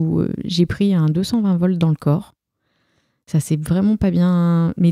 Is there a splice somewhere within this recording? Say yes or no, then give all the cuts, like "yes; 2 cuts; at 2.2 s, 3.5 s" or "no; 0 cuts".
no; 0 cuts